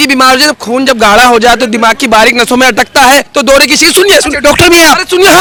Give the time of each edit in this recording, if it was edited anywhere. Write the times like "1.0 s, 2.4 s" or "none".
none